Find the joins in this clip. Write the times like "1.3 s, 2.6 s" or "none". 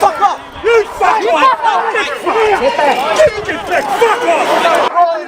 none